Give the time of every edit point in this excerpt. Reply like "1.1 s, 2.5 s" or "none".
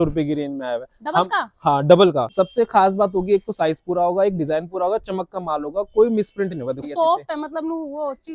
2.3 s, 6.9 s